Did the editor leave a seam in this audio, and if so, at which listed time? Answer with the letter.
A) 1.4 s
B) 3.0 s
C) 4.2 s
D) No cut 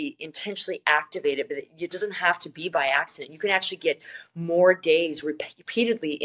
D